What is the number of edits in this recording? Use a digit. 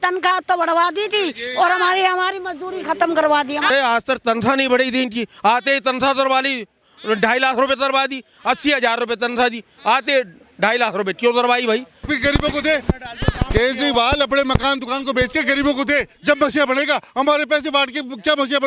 2